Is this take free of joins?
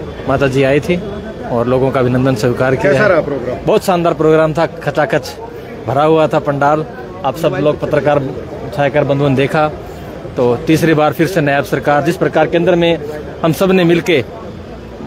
yes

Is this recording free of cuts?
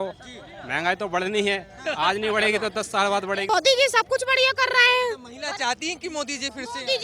no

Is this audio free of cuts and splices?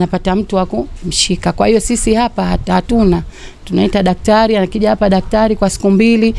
yes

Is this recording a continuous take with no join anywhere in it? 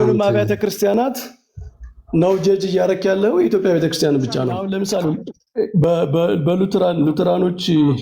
no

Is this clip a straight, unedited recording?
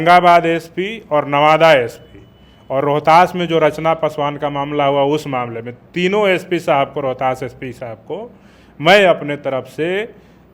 yes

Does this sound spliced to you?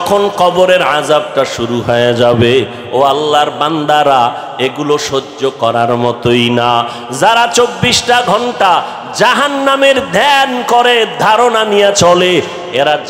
no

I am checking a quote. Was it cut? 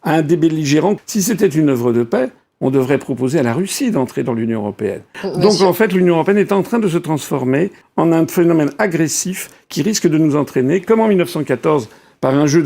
yes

